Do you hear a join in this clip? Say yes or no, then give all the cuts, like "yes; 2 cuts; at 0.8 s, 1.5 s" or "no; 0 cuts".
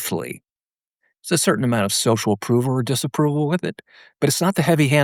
no; 0 cuts